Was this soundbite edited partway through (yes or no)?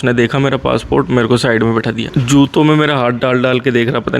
yes